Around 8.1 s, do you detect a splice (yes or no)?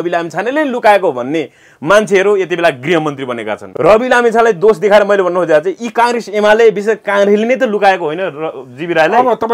no